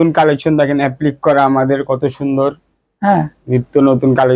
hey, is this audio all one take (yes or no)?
yes